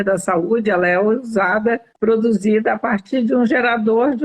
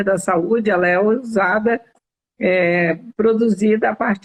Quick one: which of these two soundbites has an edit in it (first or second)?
first